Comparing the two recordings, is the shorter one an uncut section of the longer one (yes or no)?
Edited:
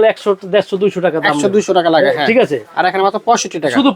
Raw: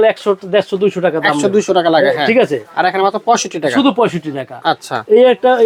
yes